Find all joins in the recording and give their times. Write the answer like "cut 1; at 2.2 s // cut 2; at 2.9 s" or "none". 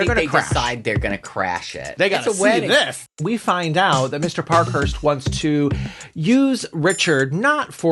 cut 1; at 1.9 s // cut 2; at 3.0 s